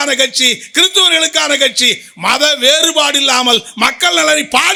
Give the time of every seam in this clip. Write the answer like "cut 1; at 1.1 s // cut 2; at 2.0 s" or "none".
none